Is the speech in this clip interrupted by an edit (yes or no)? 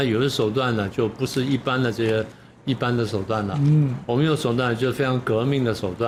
no